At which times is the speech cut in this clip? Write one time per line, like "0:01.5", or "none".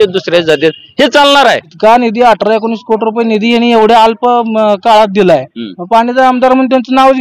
0:01.7